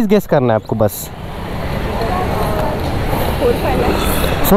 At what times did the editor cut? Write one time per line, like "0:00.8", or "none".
none